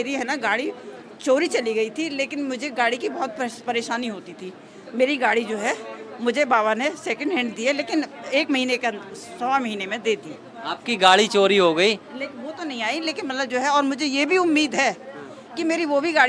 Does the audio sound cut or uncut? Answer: uncut